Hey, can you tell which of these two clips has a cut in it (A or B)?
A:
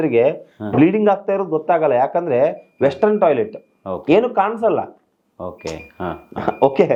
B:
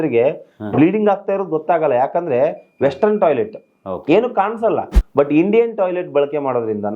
B